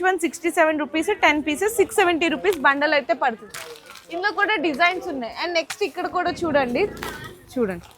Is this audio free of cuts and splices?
yes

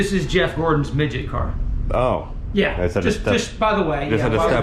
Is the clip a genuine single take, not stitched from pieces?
yes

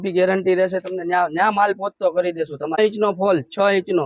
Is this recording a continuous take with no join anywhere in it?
no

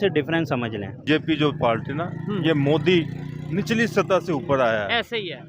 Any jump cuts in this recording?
yes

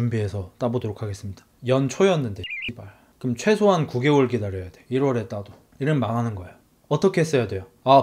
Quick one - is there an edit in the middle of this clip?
no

